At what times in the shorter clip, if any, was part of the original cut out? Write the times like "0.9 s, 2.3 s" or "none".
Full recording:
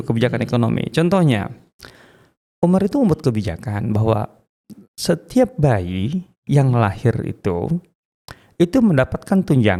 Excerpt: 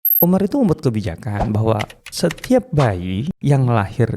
2.0 s, 3.3 s